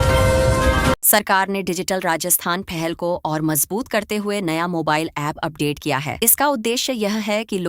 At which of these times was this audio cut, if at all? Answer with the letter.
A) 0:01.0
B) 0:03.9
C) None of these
A